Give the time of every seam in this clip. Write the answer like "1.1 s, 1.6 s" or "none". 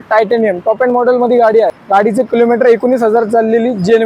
1.8 s